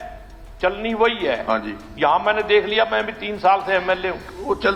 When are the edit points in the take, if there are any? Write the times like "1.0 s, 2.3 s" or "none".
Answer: none

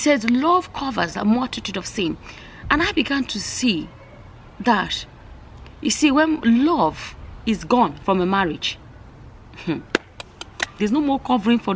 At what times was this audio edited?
10.7 s

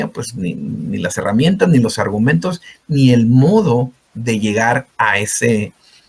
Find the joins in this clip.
none

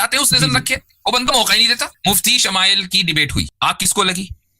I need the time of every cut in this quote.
1.9 s, 3.5 s

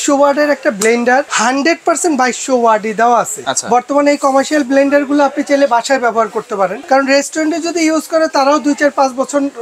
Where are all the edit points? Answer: 1.3 s, 3.5 s, 6.8 s

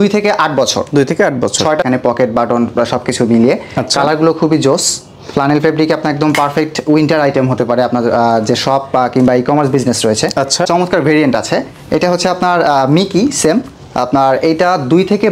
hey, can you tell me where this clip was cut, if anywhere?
1.8 s, 10.7 s

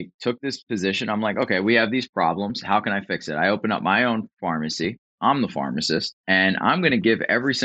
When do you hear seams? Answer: 6.1 s

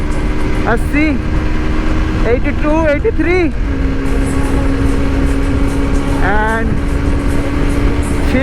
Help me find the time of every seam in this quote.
none

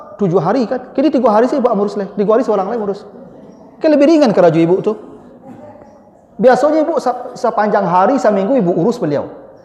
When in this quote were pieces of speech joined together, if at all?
none

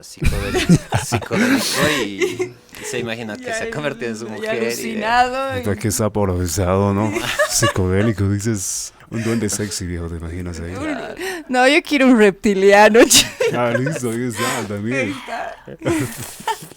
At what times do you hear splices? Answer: 9.0 s

